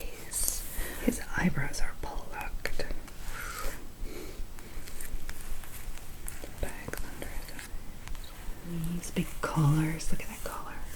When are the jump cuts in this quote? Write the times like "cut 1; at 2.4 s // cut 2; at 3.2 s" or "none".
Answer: cut 1; at 1.0 s // cut 2; at 8.7 s